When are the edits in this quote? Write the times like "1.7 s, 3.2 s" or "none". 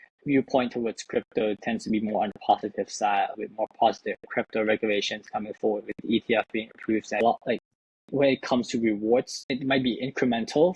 7.2 s, 9.4 s